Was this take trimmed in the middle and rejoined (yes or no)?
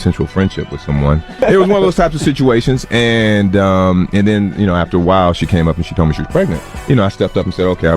yes